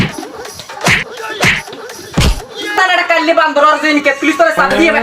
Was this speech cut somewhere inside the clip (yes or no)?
yes